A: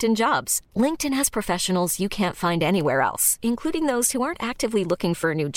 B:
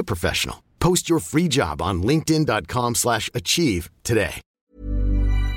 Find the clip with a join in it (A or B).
B